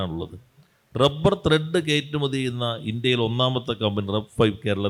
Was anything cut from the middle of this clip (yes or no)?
no